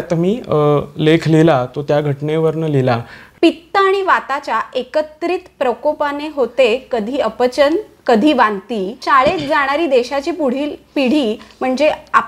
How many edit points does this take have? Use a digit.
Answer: 2